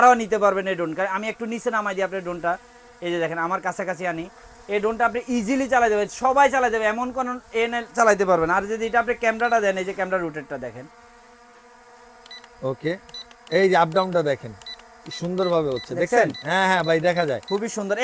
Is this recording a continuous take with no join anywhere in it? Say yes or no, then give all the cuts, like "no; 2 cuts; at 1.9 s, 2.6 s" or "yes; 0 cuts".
yes; 0 cuts